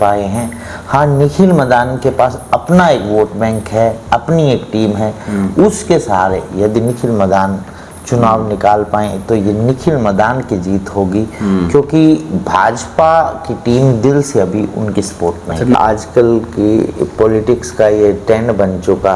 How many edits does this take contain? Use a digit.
1